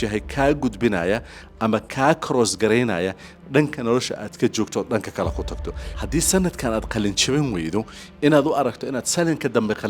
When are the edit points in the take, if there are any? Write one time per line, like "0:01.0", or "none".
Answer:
0:05.9